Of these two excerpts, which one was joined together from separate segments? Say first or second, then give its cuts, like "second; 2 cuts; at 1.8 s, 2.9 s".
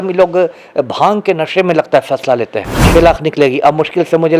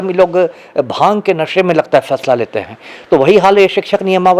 first; 1 cut; at 2.9 s